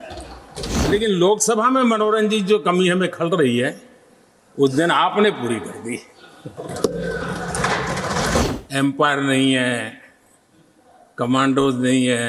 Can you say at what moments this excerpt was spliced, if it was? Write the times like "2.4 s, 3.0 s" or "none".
0.9 s, 8.4 s